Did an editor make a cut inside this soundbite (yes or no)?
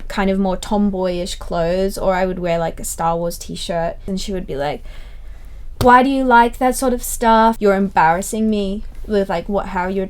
yes